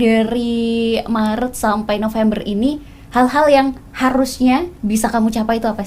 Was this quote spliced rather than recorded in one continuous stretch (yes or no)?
yes